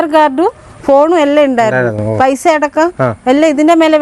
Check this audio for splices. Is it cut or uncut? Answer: uncut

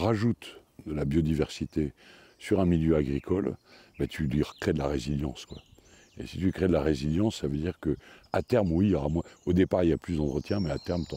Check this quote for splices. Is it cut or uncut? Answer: uncut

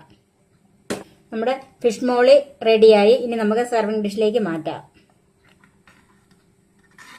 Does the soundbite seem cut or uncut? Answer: cut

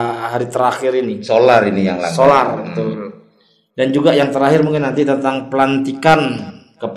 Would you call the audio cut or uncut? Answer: uncut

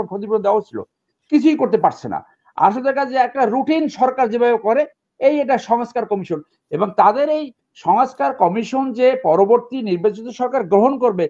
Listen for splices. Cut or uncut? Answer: uncut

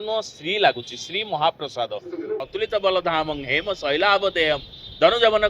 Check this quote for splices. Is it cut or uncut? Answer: cut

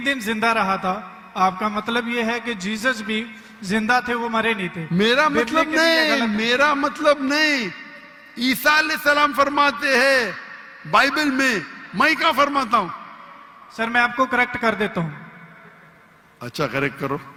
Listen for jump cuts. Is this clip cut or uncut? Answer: uncut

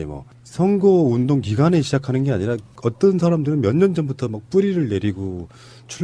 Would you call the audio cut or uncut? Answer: uncut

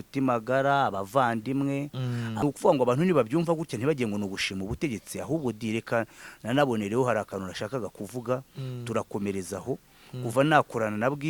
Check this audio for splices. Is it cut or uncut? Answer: cut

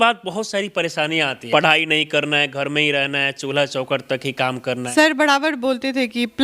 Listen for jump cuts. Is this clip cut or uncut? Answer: cut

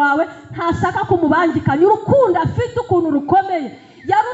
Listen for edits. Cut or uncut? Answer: uncut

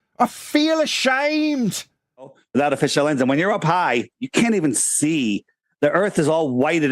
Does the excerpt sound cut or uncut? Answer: cut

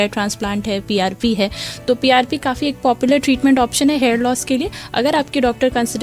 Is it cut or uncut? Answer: uncut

